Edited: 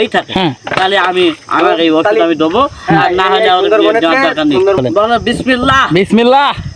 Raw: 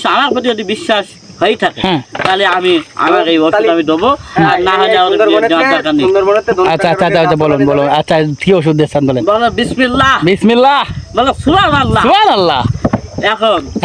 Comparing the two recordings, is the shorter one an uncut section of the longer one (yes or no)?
no